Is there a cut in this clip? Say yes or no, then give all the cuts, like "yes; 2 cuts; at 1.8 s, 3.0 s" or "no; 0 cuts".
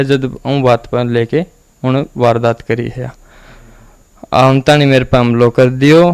no; 0 cuts